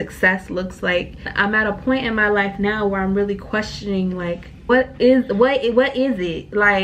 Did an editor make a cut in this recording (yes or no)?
yes